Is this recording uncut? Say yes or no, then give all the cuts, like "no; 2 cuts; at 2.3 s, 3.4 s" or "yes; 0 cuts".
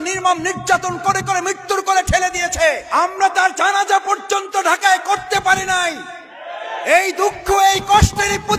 no; 1 cut; at 2.8 s